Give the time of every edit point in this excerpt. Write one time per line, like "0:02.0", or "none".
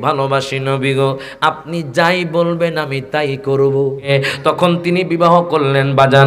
0:04.1